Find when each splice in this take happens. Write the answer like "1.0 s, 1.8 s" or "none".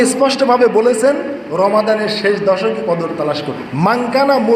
3.6 s